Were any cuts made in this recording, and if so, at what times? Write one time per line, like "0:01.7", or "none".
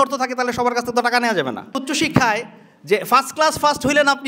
0:01.8